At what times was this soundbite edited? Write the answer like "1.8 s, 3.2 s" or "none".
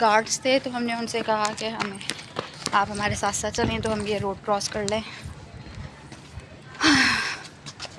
none